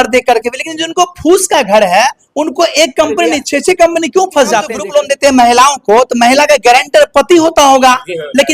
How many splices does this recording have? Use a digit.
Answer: 1